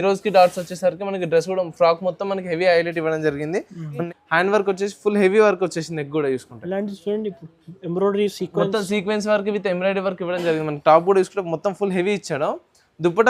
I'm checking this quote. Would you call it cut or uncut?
cut